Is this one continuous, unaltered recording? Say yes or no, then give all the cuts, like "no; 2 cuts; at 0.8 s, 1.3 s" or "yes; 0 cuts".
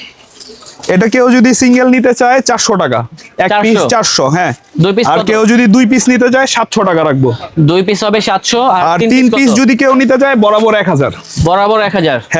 yes; 0 cuts